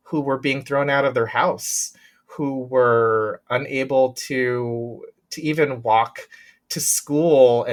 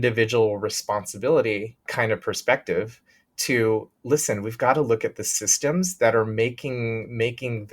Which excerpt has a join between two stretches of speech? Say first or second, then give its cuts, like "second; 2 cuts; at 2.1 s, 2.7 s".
second; 1 cut; at 1.9 s